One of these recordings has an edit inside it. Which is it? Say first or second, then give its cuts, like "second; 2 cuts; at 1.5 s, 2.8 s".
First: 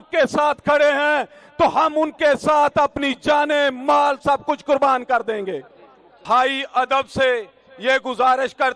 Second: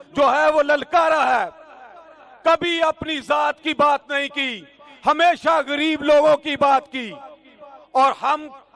first; 1 cut; at 6.1 s